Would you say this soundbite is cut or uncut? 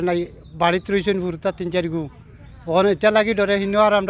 uncut